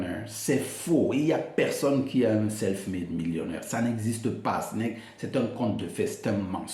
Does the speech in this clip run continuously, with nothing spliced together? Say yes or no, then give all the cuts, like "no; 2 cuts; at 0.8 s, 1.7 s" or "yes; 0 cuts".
yes; 0 cuts